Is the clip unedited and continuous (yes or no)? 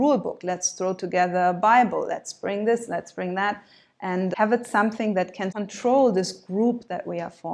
no